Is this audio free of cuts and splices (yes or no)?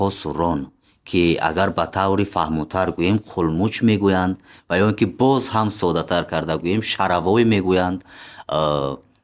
yes